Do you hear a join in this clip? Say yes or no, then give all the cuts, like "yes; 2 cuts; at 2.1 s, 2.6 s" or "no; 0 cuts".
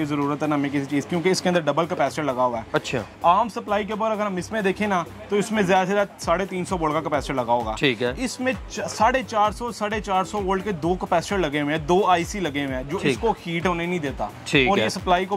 no; 0 cuts